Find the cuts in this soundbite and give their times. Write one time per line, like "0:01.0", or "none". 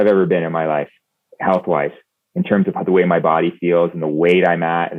none